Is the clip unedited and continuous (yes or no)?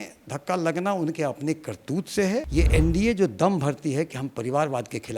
no